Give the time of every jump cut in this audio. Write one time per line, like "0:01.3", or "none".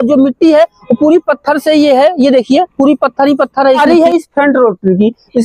0:03.8